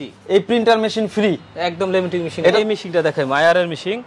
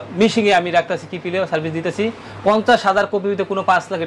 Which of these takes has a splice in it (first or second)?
first